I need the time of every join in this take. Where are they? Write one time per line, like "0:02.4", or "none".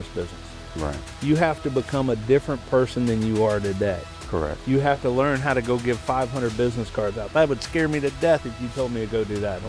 none

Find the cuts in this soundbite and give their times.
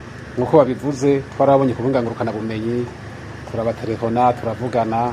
none

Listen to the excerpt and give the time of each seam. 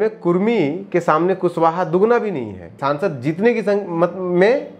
0:02.8

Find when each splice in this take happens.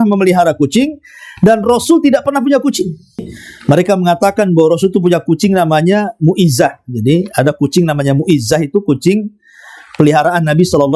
0:03.3

